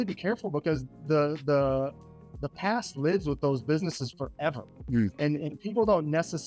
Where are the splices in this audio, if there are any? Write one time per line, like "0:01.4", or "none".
none